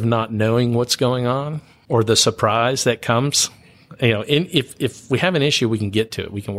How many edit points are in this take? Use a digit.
1